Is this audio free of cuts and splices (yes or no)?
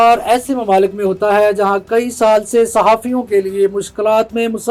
yes